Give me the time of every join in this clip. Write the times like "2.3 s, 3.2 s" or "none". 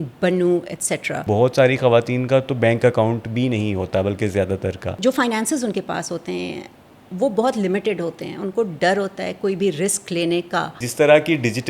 1.2 s, 5.0 s, 10.8 s